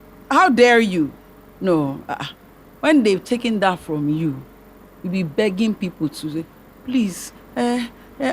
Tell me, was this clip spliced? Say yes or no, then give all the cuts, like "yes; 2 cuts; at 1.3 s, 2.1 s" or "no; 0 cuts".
no; 0 cuts